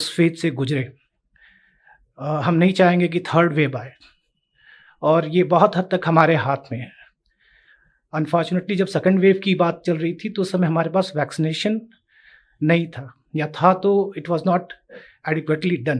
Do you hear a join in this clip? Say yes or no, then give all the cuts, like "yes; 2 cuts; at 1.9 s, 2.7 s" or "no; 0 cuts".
no; 0 cuts